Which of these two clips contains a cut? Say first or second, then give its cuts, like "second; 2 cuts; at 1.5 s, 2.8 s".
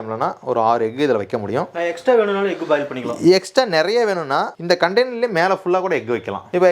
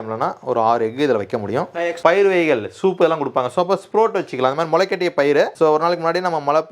second; 1 cut; at 2.0 s